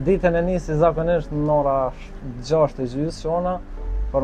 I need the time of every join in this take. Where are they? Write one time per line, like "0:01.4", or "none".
none